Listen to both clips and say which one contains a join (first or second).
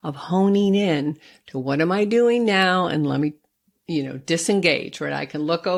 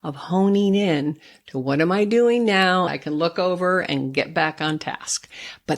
second